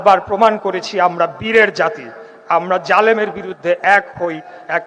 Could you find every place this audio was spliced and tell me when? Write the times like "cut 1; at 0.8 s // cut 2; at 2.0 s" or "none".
none